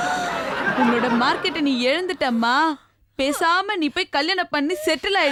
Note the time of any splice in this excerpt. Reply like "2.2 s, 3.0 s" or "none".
none